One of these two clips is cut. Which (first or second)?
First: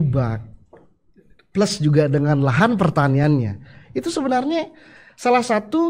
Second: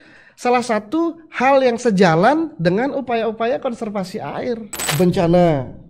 second